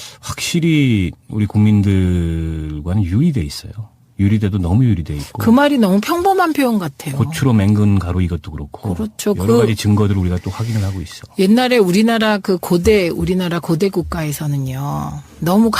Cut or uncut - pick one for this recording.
cut